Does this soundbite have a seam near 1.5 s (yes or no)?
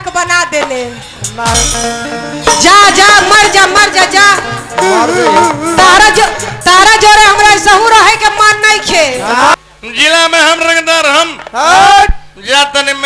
yes